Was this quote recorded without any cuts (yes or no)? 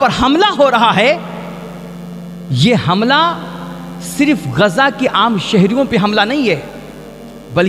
yes